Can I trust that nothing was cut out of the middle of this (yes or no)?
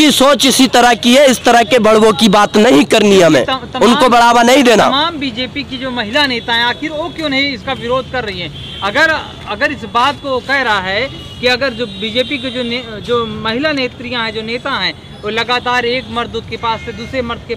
yes